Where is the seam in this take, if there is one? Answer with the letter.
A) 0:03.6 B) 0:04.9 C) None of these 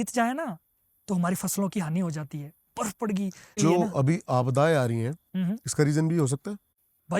A